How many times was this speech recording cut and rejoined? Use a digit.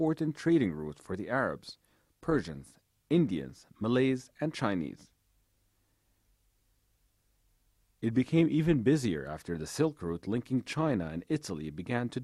1